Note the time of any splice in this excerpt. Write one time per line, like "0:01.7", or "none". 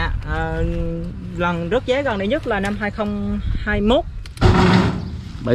0:04.2